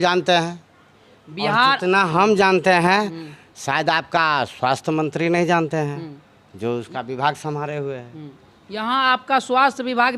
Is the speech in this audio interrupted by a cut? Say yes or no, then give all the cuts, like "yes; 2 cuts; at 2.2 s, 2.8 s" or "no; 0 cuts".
no; 0 cuts